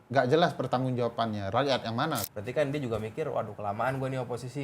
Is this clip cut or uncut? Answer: cut